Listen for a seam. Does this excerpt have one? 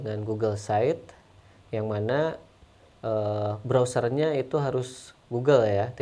no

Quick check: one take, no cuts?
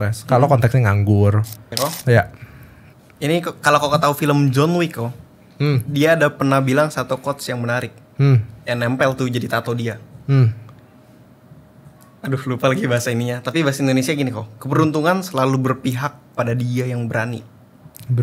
no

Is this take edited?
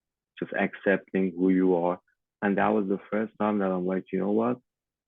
yes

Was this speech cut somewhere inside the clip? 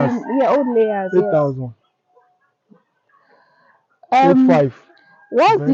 no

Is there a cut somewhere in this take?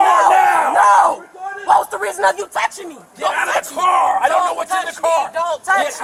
no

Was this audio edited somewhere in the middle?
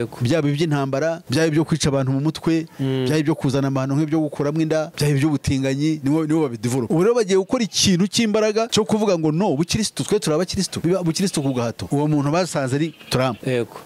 yes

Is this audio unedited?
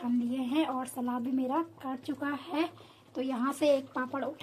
yes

